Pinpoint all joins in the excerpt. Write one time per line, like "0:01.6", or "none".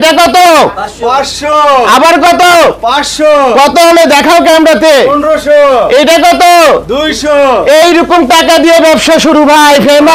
none